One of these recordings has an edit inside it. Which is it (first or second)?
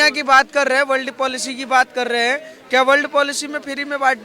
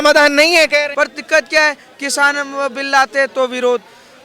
second